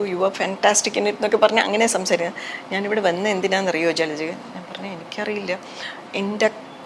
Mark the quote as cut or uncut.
uncut